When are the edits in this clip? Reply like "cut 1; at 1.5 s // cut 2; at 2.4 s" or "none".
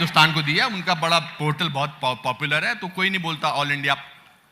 cut 1; at 1.9 s